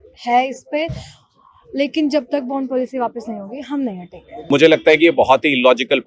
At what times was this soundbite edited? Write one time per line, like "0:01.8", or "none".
0:04.5